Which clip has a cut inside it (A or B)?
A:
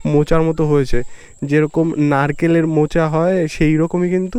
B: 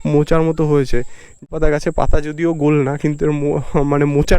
B